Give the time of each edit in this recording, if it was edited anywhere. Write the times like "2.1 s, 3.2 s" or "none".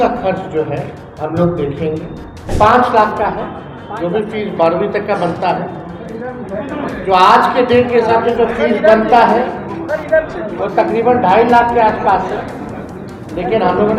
1.0 s, 2.5 s